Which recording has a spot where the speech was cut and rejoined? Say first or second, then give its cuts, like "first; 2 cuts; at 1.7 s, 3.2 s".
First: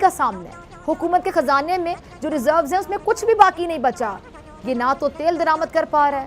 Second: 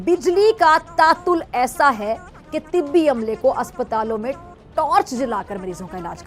first; 1 cut; at 4.5 s